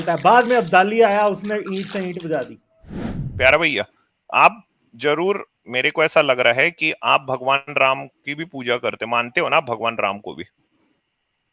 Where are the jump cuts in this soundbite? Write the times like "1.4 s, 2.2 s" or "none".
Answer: 3.2 s